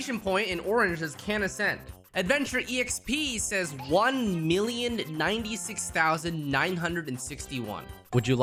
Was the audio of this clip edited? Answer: no; 0 cuts

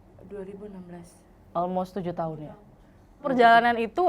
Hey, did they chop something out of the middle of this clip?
yes; 1 cut; at 3.2 s

